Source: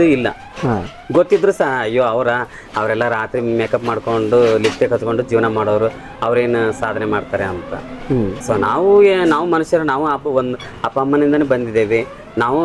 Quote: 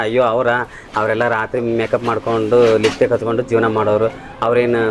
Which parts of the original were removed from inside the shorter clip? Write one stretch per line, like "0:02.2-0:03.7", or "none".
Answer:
none